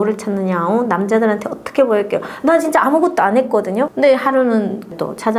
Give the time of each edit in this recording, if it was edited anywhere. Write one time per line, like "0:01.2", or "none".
0:03.9